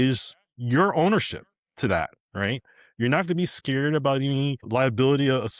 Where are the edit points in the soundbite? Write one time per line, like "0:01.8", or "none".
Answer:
0:04.7